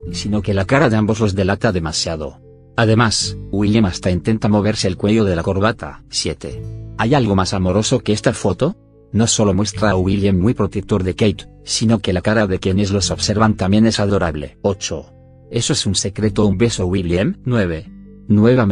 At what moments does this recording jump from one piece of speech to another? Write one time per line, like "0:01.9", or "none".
none